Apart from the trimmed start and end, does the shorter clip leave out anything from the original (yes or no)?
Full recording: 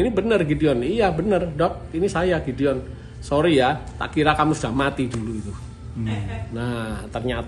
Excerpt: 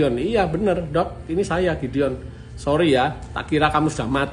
no